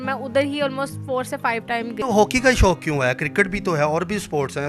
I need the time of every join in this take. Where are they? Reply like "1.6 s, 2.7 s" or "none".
2.0 s